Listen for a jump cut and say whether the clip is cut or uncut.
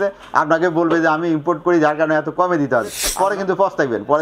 cut